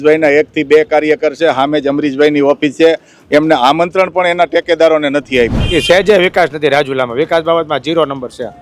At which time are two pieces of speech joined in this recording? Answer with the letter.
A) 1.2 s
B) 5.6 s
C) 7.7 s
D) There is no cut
B